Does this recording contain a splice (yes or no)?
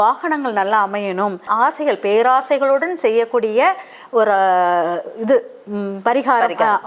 yes